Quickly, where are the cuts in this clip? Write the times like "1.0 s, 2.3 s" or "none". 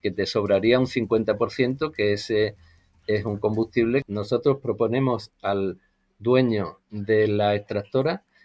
4.0 s